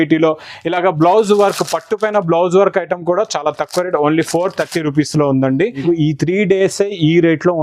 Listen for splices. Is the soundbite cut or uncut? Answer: cut